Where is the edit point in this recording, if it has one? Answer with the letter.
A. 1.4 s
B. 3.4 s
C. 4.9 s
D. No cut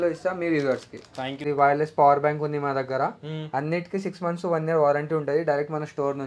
A